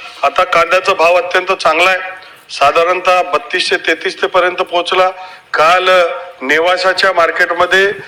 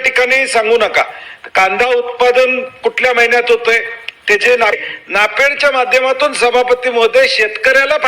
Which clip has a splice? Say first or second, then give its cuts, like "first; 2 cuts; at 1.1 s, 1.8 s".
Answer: second; 1 cut; at 4.7 s